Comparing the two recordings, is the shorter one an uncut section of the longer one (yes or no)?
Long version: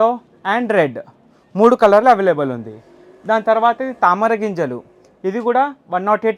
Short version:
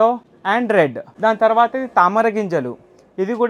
no